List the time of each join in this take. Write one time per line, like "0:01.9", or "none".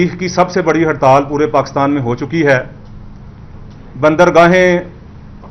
none